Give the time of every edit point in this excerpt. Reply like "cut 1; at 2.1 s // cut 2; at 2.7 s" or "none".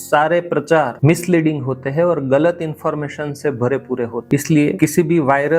cut 1; at 4.2 s